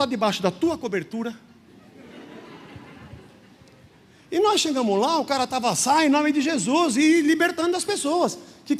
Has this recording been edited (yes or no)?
no